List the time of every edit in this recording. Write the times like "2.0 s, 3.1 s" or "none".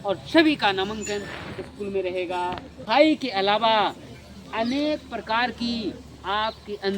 2.7 s